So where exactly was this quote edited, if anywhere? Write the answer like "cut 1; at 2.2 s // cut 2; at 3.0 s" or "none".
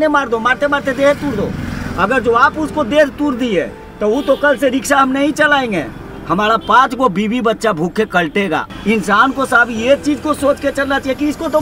cut 1; at 8.7 s

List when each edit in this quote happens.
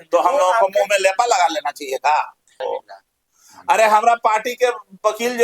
cut 1; at 2.5 s

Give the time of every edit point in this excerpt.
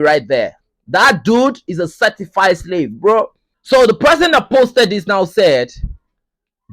cut 1; at 3.5 s

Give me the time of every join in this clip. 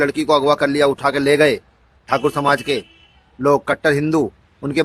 none

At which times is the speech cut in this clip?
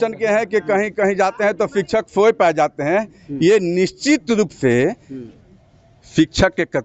none

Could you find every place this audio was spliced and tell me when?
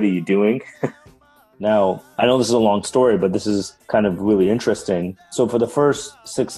cut 1; at 1.2 s

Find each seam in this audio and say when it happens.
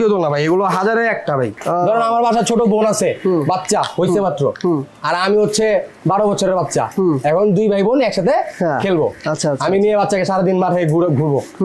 cut 1; at 1.6 s

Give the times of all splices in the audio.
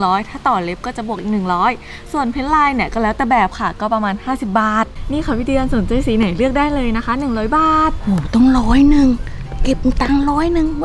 cut 1; at 5.0 s

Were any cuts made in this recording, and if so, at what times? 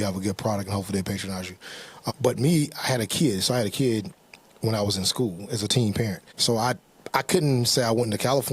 cut 1; at 2.1 s // cut 2; at 6.3 s

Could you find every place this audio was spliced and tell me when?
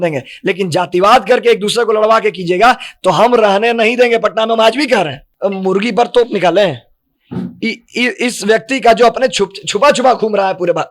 cut 1; at 5.2 s

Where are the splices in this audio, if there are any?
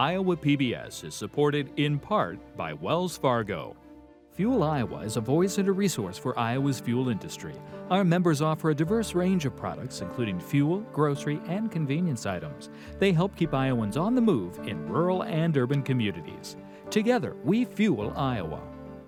none

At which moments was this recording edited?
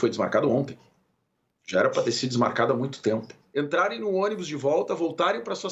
cut 1; at 3.4 s

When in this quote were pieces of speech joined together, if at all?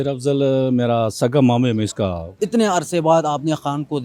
cut 1; at 2.3 s

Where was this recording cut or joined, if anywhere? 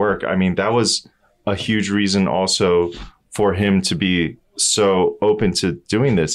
none

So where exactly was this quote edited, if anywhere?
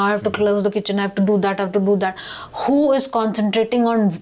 none

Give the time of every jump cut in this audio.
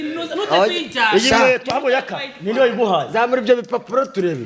none

